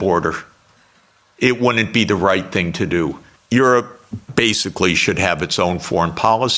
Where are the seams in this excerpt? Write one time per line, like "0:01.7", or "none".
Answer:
0:03.3